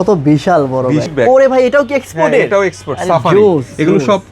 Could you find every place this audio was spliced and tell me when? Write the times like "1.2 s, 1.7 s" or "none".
1.1 s